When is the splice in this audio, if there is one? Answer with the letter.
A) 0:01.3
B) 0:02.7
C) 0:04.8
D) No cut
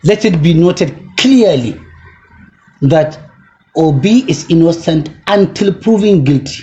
D